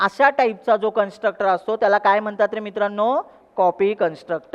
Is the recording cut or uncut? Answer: uncut